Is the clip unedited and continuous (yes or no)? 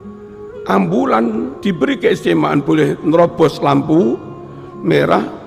no